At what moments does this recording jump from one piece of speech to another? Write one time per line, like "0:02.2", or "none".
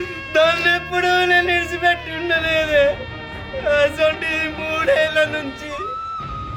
none